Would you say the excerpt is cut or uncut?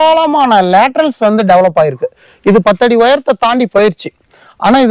uncut